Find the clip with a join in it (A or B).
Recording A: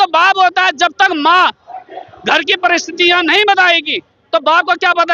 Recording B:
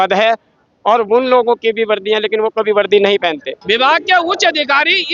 B